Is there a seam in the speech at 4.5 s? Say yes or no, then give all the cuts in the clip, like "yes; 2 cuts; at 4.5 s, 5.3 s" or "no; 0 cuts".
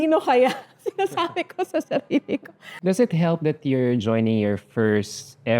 no; 1 cut; at 2.7 s